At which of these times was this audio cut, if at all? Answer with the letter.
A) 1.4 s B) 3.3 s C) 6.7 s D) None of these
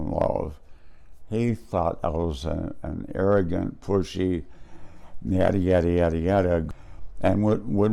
C